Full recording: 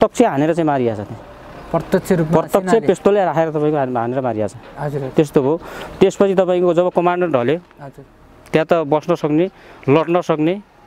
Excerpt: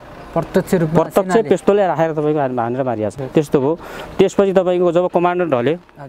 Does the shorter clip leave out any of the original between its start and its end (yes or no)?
yes